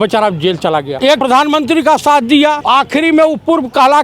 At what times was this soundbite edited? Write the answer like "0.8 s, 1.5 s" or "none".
1.0 s, 2.6 s